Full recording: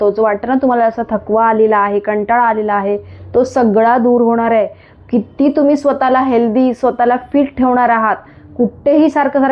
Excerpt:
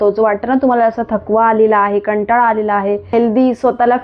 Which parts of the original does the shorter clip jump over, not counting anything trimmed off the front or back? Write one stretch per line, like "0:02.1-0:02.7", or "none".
0:03.1-0:06.3